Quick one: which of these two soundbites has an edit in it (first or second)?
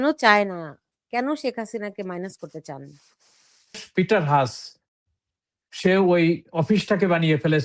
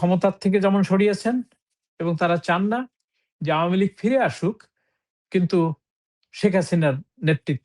first